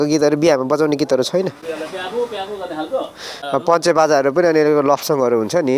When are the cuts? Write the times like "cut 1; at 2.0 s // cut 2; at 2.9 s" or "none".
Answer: cut 1; at 3.3 s

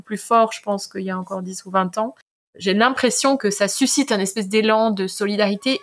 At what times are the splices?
cut 1; at 2.5 s // cut 2; at 3.4 s

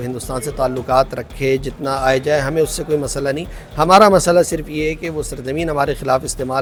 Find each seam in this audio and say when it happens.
none

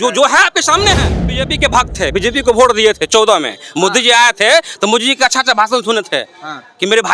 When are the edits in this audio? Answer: cut 1; at 1.5 s

